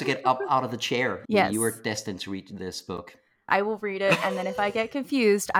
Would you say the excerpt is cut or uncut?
cut